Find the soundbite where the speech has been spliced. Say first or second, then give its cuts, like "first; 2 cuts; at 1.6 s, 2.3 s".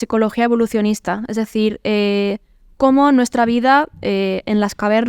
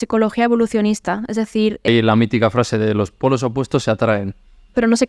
second; 1 cut; at 1.9 s